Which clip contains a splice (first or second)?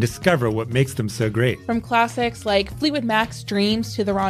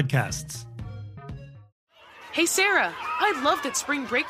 second